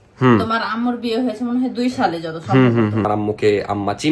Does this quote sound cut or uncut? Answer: cut